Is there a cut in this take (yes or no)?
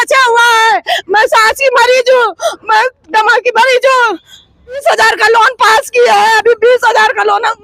yes